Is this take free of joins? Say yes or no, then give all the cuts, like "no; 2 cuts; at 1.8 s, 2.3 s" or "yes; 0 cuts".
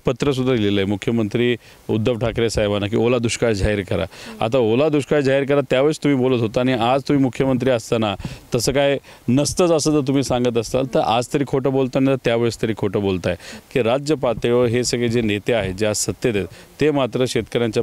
no; 1 cut; at 13.5 s